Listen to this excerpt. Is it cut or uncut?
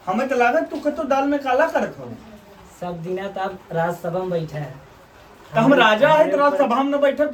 uncut